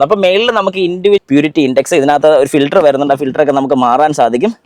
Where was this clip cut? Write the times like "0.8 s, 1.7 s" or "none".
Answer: 1.2 s